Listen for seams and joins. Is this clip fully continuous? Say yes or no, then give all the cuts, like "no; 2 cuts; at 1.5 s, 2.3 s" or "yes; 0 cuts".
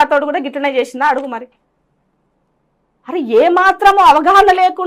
yes; 0 cuts